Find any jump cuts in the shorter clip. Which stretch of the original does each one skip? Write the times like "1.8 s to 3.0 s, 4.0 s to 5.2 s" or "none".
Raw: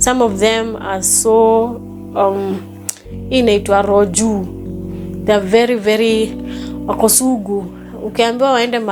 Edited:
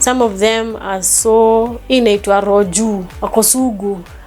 1.8 s to 3.2 s, 4.6 s to 6.8 s